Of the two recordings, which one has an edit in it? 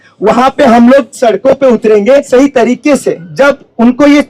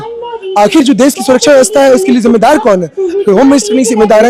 first; 1 cut; at 2.3 s

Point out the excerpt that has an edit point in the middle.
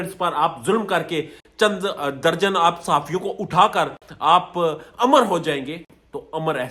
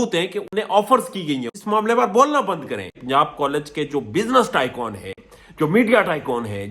second; 2 cuts; at 1.5 s, 2.9 s

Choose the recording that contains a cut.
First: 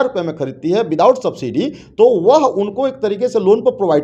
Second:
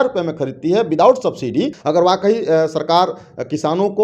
second; 1 cut; at 1.8 s

